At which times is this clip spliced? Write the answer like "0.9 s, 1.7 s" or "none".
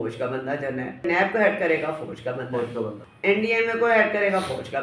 1.0 s, 3.0 s